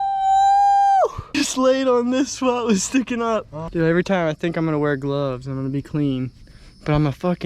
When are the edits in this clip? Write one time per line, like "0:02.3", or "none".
0:01.3
0:03.6